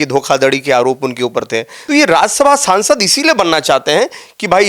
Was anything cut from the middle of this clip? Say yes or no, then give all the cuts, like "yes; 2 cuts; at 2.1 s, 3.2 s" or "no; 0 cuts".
yes; 1 cut; at 1.7 s